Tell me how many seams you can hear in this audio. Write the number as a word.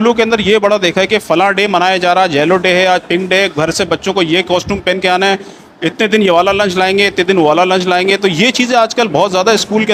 zero